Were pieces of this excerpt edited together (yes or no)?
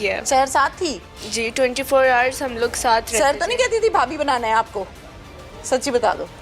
no